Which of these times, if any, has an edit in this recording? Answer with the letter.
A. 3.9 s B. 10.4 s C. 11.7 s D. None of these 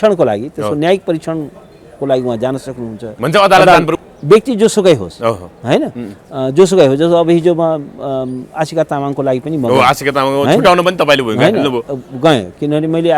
A